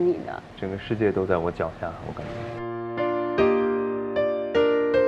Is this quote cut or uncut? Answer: uncut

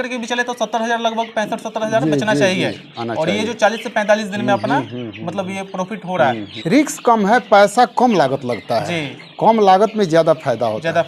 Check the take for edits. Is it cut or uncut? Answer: cut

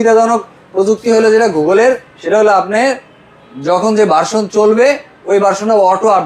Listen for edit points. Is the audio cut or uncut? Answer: uncut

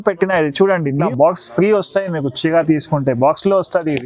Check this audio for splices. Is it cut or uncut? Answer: cut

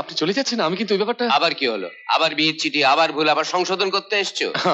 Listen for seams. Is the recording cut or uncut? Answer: uncut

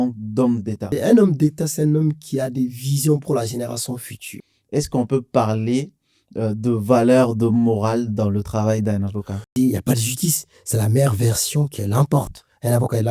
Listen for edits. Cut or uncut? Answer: cut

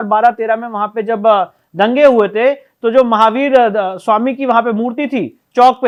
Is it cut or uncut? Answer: uncut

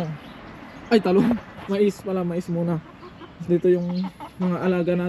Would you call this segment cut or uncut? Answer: uncut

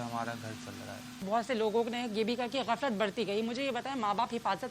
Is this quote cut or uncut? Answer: cut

